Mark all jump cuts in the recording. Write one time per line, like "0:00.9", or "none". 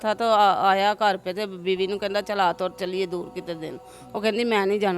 none